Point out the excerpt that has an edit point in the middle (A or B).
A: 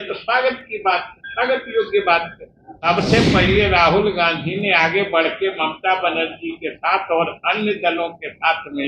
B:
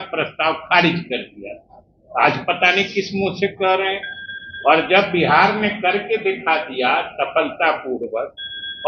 A